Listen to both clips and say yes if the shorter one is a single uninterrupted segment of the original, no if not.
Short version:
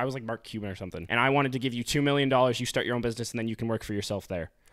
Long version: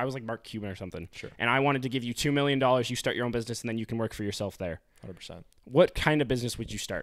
no